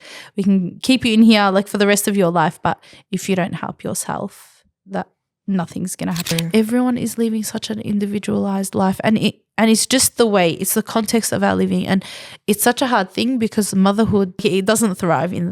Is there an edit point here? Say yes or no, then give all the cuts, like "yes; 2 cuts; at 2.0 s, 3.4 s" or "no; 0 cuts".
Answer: yes; 2 cuts; at 6.3 s, 14.4 s